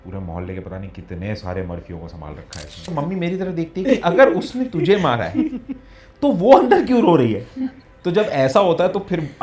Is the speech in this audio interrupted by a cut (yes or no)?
yes